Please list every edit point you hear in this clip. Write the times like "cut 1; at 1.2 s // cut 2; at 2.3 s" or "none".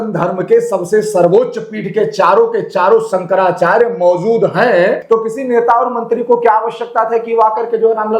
cut 1; at 5.0 s